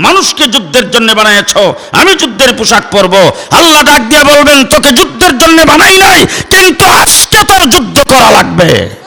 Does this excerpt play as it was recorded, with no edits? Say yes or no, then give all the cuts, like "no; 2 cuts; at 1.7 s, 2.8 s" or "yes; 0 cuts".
yes; 0 cuts